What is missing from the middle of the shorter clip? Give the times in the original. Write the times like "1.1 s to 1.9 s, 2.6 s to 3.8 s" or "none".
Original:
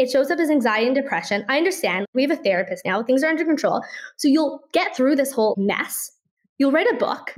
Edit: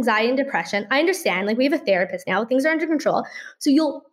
none